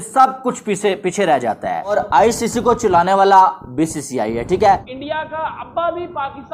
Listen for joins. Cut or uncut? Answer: cut